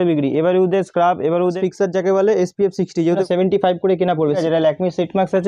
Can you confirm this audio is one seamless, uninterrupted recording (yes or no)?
no